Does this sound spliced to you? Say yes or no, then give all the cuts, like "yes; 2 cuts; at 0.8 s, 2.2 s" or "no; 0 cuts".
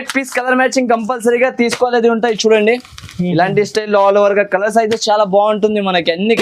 no; 0 cuts